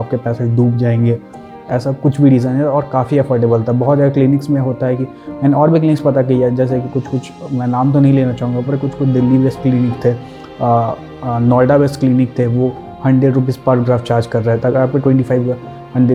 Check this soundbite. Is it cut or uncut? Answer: uncut